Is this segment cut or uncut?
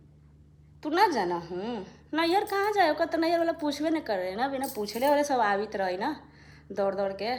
uncut